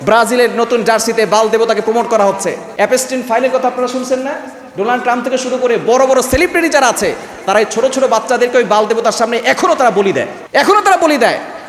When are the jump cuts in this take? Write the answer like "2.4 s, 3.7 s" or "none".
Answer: 2.6 s